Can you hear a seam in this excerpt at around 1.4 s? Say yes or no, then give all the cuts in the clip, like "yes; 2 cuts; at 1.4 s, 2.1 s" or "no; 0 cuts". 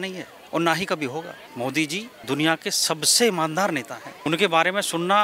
yes; 3 cuts; at 1.4 s, 2.1 s, 4.1 s